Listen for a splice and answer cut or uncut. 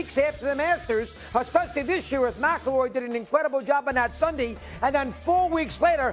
uncut